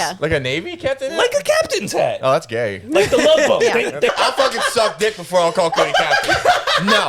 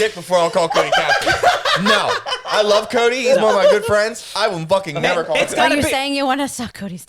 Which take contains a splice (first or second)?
first